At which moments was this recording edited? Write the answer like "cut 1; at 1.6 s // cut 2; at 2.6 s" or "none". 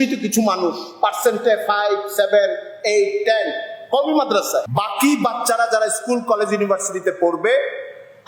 none